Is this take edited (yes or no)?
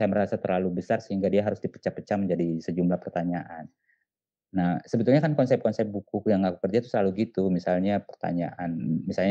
no